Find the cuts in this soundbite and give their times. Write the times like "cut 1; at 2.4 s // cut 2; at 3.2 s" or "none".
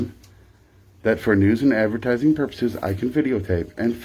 none